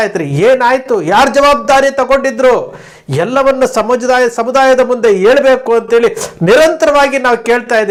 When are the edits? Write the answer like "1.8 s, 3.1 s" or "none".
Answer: none